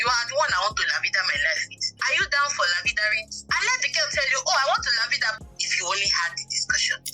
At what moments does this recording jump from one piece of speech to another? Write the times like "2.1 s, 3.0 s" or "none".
5.3 s